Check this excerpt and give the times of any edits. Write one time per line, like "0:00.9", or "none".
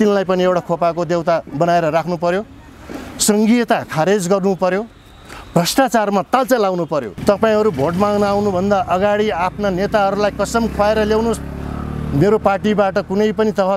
0:07.1

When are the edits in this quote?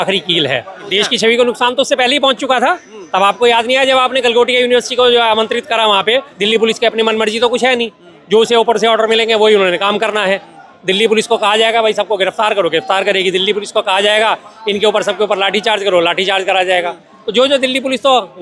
0:00.9
0:06.3

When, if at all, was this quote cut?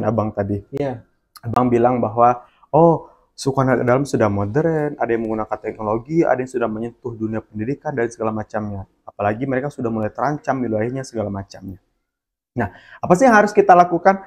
none

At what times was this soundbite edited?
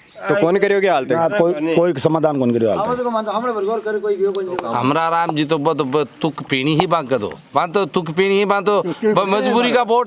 0:04.7

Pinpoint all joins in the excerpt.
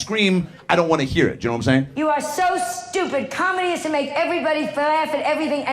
0:01.9

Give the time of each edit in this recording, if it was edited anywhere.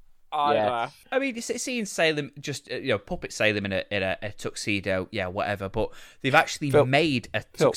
0:01.0

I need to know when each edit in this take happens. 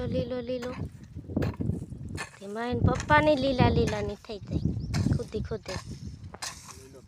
none

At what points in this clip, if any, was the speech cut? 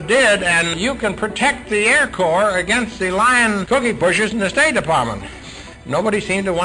0:00.7
0:03.6
0:05.5

